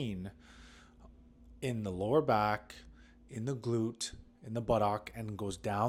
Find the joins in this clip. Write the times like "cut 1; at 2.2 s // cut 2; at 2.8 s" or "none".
none